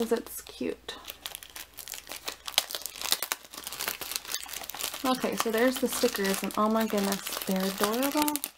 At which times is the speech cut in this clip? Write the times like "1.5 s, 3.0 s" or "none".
none